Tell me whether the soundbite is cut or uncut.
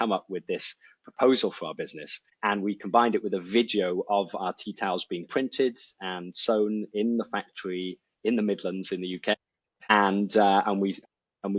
uncut